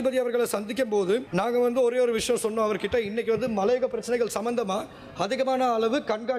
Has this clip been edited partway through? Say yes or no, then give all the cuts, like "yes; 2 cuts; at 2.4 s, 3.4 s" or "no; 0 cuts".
yes; 1 cut; at 1.3 s